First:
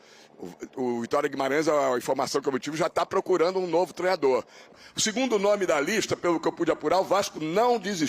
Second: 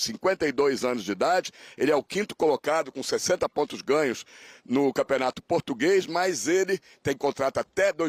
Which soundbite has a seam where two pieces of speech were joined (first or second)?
first